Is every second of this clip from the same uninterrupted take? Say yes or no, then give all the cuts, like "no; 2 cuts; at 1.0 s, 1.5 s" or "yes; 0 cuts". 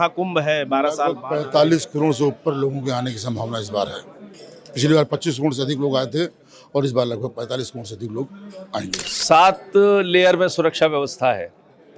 no; 1 cut; at 9.1 s